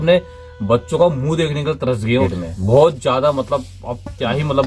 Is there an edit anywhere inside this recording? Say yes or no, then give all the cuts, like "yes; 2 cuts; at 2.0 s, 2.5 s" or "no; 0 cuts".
yes; 1 cut; at 2.2 s